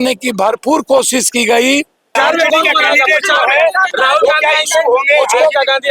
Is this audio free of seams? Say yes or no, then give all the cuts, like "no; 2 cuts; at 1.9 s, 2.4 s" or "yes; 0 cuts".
no; 1 cut; at 2.1 s